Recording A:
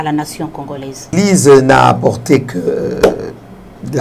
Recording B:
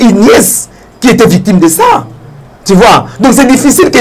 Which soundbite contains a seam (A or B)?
A